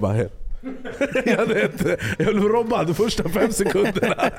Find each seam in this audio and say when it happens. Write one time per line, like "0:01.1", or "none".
none